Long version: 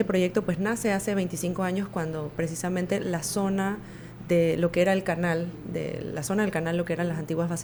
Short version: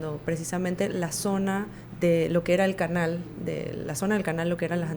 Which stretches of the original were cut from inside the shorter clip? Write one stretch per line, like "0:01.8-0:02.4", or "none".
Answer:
0:03.9-0:04.1

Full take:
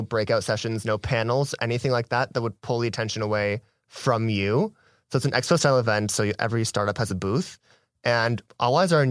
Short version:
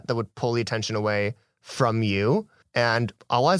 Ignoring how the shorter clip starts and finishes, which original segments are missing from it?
0:04.8-0:07.9

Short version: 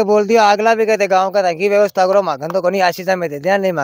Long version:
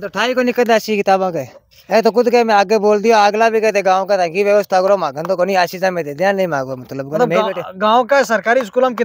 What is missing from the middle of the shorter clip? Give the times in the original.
none

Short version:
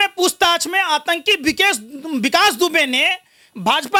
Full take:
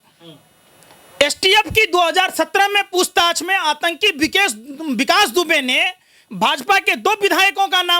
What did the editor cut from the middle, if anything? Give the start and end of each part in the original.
none

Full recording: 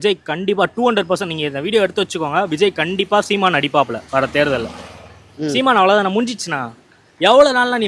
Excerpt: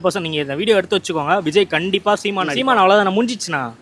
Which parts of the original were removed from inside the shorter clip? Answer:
0:03.4-0:05.4

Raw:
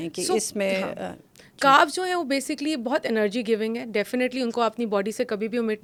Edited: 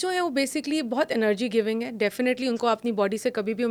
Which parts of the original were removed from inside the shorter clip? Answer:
none

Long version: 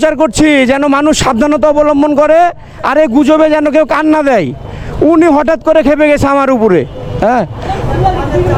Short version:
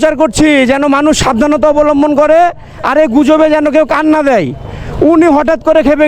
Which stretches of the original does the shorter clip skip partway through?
none

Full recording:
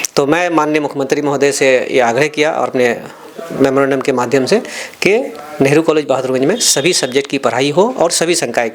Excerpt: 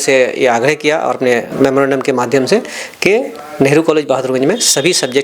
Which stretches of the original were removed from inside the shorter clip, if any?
0:03.0-0:03.5

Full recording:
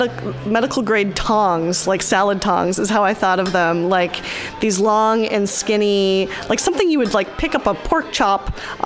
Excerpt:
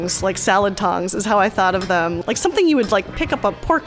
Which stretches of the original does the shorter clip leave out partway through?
0:03.8-0:06.4

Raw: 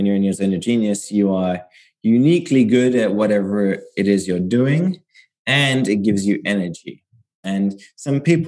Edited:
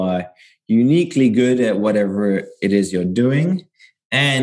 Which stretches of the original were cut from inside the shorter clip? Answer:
none

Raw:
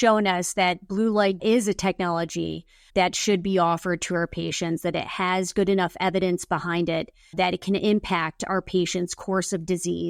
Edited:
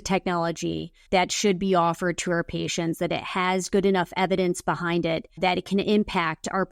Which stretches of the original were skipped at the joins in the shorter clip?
0:02.6-0:02.8
0:07.1-0:07.2

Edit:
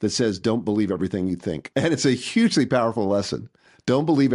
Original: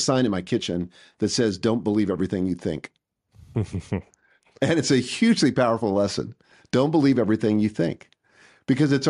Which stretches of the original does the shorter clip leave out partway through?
0:02.8-0:04.5

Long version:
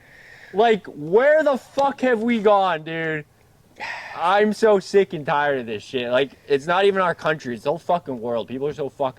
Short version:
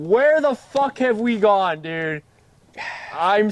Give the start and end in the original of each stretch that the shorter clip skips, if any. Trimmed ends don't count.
none

